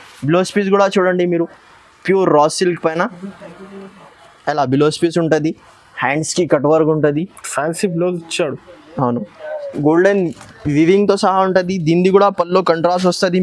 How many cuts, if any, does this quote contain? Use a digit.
1